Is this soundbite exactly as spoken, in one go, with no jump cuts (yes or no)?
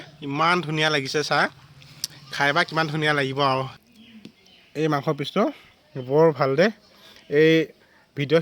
no